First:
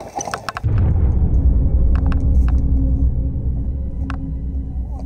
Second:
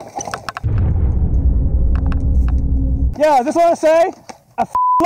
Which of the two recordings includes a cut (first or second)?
second